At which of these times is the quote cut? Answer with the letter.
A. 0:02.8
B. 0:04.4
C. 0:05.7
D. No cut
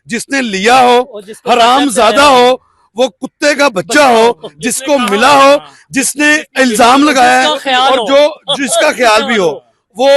D